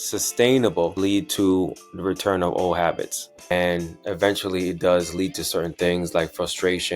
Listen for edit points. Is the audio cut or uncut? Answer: cut